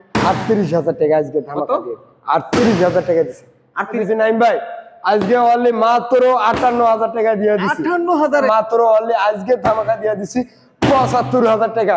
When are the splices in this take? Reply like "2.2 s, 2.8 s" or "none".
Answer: 3.9 s, 8.3 s